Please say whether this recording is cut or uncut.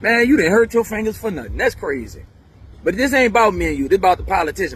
uncut